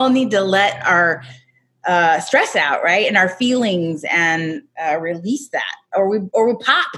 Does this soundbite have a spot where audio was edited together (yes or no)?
no